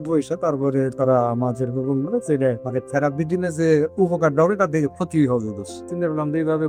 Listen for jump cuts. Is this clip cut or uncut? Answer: cut